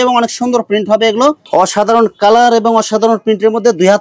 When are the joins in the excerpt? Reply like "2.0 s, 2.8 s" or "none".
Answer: 1.4 s

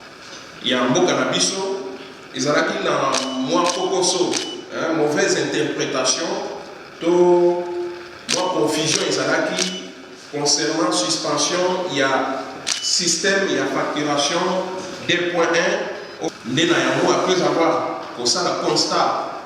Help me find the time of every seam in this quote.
16.2 s

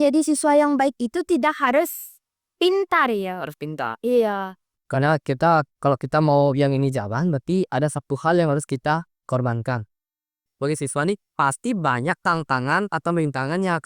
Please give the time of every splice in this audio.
4.8 s, 10.5 s

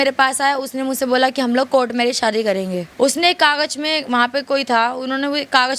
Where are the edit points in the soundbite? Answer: 2.8 s

